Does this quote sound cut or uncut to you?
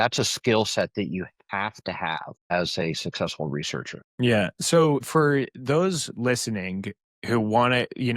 cut